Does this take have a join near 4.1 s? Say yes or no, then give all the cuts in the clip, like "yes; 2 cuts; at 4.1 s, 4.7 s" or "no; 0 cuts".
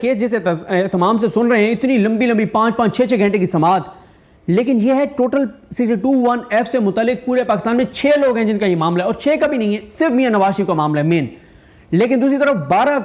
no; 0 cuts